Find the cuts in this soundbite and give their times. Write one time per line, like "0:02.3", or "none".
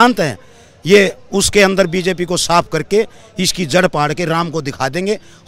none